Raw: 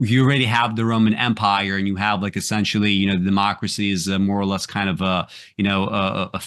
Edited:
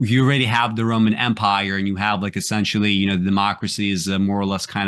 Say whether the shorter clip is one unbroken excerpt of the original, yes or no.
yes